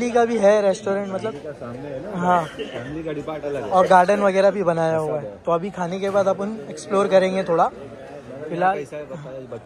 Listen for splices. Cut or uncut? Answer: uncut